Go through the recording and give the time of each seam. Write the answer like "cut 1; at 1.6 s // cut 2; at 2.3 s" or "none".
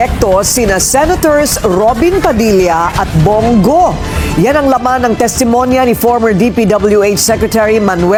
none